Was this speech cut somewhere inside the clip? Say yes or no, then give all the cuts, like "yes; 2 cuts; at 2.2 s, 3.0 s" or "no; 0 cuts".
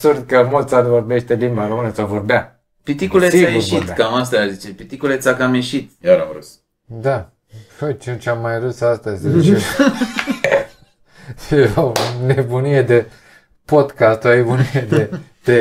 yes; 1 cut; at 5.9 s